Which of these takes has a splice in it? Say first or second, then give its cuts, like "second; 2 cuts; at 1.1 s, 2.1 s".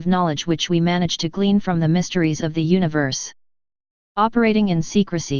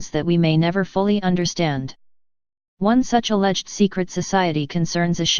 first; 1 cut; at 1.3 s